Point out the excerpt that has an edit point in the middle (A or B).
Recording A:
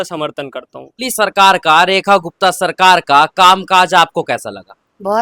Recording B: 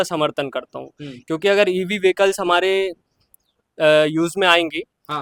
A